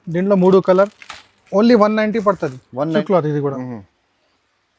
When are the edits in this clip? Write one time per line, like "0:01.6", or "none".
0:03.0